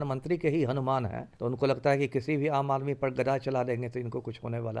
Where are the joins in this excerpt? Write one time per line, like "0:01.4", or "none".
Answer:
0:01.2